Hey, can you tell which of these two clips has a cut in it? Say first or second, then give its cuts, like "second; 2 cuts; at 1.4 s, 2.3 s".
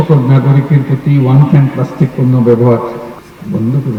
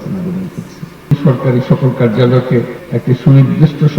second; 1 cut; at 1.1 s